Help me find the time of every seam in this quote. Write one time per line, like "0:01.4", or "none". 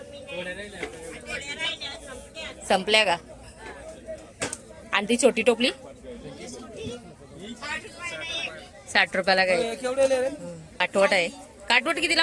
0:10.8